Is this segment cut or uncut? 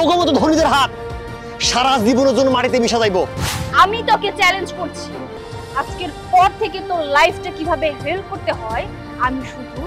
cut